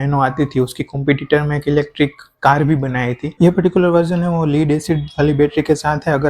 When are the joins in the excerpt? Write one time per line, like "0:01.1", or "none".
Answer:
0:03.3

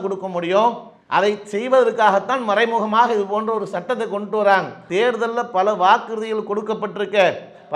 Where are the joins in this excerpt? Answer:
0:04.8

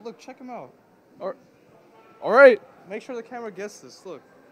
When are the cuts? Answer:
0:01.6

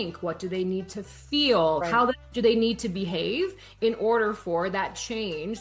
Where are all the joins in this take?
0:01.8

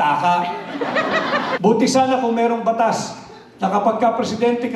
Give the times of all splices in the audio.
0:01.6

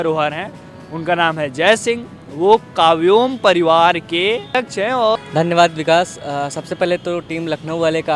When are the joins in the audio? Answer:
0:04.8

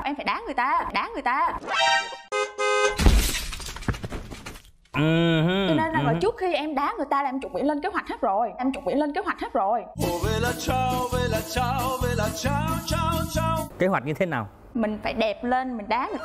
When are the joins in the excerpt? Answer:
none

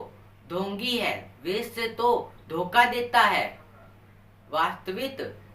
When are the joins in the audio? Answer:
0:01.3

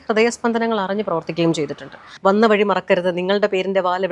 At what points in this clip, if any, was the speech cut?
0:02.1

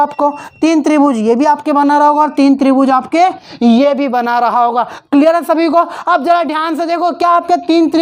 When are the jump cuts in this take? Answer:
none

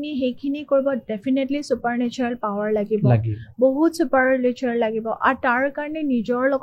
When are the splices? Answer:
none

